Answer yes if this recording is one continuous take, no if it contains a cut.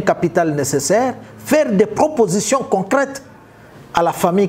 yes